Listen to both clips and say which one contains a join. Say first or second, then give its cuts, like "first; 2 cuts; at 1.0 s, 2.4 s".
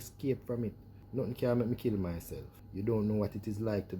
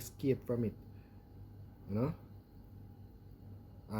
first; 2 cuts; at 0.9 s, 2.6 s